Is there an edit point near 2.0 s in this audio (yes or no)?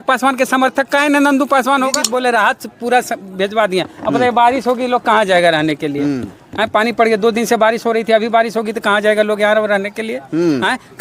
yes